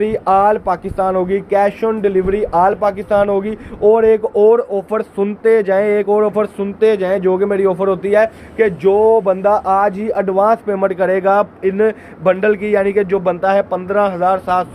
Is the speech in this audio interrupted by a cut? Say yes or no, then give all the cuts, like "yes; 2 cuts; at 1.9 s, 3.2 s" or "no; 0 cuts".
no; 0 cuts